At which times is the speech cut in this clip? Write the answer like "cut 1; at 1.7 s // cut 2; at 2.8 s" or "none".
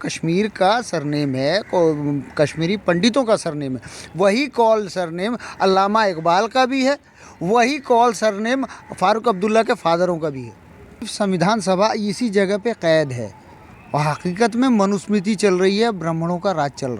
cut 1; at 10.9 s